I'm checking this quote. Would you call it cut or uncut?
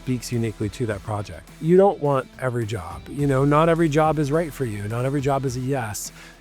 cut